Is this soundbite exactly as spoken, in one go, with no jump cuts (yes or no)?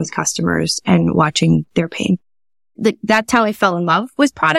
no